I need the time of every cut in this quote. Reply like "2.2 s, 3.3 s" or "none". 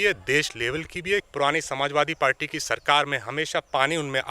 1.3 s